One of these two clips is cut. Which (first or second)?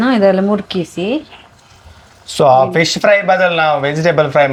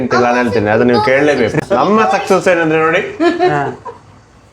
second